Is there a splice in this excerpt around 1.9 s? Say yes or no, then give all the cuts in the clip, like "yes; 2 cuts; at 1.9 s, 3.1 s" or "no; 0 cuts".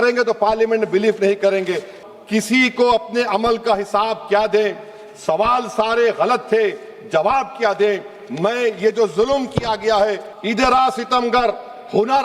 yes; 2 cuts; at 1.9 s, 10.3 s